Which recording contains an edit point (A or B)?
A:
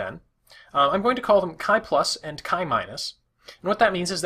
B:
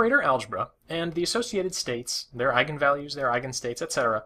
A